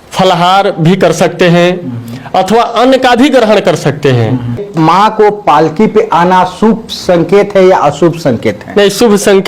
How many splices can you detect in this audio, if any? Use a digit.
1